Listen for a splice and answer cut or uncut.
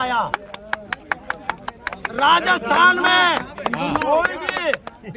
uncut